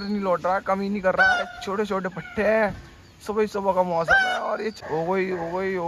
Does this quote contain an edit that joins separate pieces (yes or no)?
yes